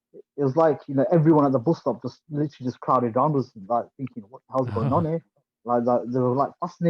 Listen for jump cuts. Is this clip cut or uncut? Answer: uncut